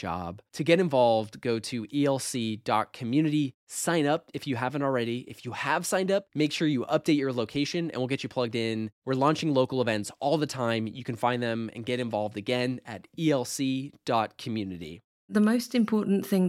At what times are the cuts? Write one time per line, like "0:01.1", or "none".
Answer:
0:15.2